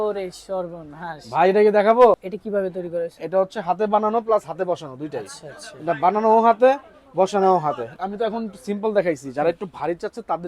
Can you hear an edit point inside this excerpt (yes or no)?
yes